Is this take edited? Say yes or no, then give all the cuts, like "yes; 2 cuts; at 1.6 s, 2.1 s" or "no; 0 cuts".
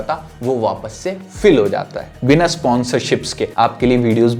yes; 2 cuts; at 2.1 s, 3.4 s